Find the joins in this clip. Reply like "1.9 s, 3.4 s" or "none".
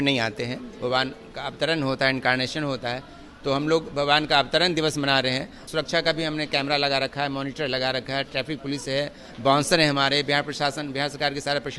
5.6 s